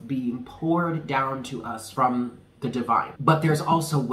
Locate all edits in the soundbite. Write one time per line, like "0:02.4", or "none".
0:01.8
0:03.1